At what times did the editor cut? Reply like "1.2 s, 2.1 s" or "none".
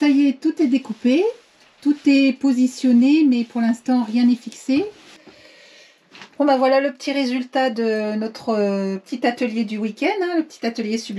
5.2 s